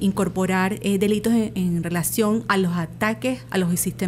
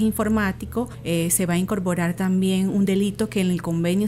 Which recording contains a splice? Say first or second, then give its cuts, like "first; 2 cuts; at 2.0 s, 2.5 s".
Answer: second; 1 cut; at 1.0 s